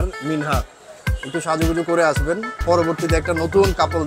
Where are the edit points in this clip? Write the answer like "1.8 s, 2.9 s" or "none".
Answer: 2.6 s